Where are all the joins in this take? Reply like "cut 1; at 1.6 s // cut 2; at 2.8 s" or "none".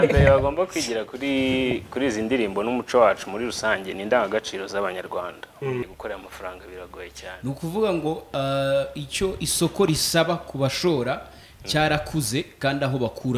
cut 1; at 5.8 s

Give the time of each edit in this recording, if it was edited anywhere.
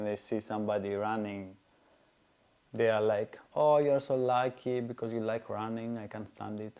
none

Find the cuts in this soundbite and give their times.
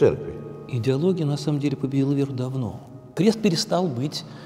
cut 1; at 3.1 s

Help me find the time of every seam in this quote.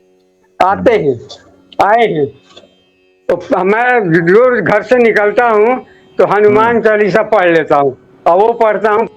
cut 1; at 3.1 s

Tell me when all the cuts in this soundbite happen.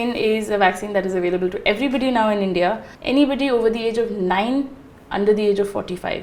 cut 1; at 2.9 s

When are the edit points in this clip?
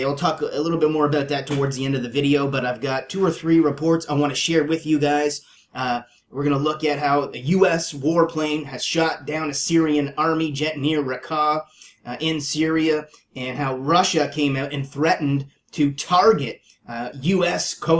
cut 1; at 6.4 s

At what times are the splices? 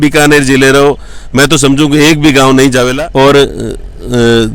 cut 1; at 2.9 s

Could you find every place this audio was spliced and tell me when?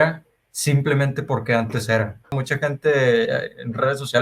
cut 1; at 2.4 s

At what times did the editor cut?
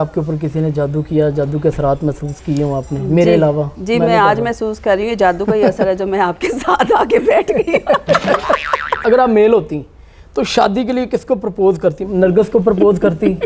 cut 1; at 9.0 s // cut 2; at 12.0 s

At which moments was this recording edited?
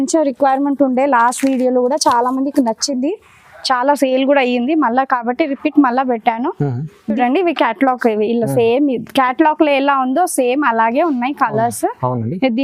none

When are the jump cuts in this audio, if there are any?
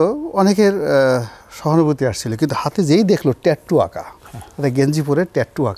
none

